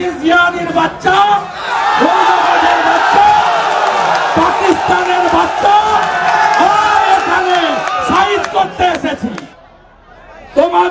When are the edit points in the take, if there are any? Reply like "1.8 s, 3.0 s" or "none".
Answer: 9.5 s